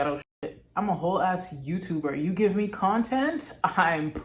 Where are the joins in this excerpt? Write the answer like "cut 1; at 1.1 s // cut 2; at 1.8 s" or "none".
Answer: none